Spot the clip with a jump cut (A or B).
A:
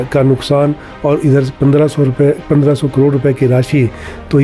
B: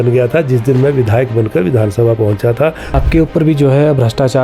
B